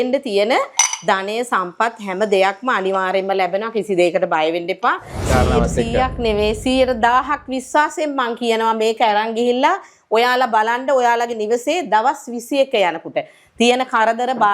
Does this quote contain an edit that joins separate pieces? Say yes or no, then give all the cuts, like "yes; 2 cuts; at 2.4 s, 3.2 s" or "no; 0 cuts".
yes; 1 cut; at 5.3 s